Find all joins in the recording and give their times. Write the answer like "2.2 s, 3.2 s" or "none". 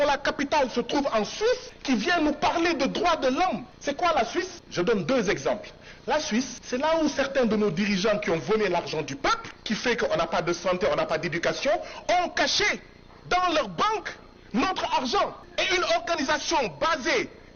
1.7 s, 3.7 s, 4.6 s, 6.6 s, 9.5 s, 15.4 s